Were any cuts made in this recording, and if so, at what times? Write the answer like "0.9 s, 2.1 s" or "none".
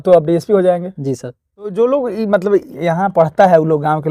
1.7 s